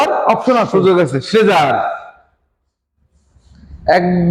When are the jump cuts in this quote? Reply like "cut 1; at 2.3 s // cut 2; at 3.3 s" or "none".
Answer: none